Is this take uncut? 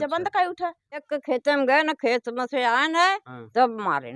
no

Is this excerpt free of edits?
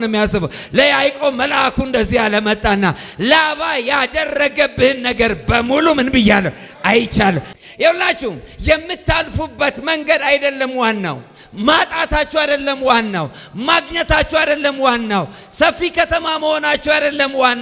no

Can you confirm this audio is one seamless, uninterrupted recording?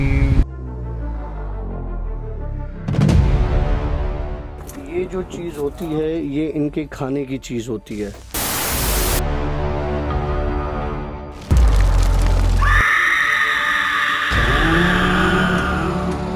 yes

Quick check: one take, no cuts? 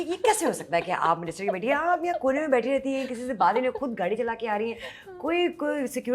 yes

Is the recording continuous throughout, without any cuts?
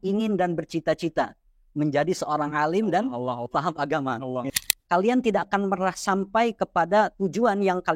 no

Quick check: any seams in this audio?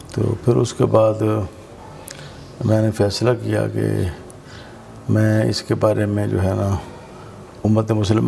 no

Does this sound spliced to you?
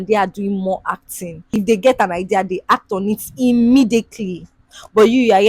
yes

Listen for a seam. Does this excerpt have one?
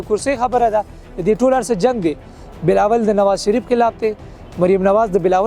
no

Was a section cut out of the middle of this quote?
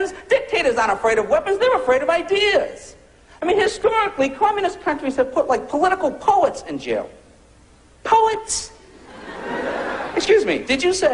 no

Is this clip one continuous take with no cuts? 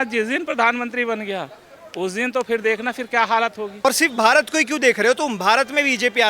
no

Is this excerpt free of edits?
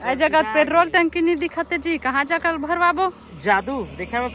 yes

